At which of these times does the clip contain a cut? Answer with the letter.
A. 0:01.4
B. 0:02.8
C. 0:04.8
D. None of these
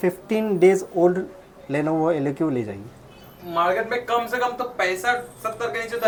D